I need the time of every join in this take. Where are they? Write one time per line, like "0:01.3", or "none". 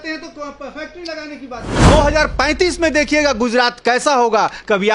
0:01.9